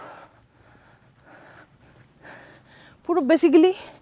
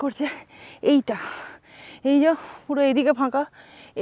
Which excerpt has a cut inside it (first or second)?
first